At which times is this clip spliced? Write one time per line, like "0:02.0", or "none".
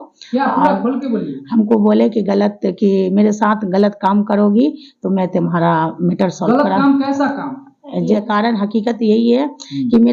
0:08.2